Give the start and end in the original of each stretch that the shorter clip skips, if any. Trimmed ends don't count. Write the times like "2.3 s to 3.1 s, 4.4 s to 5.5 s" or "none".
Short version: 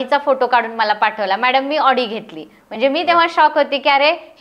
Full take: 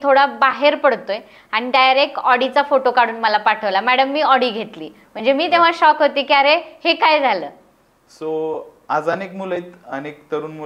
none